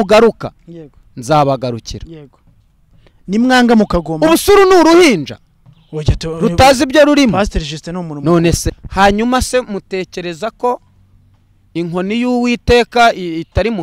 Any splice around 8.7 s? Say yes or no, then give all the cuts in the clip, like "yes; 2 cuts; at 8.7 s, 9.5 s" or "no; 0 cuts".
yes; 1 cut; at 8.7 s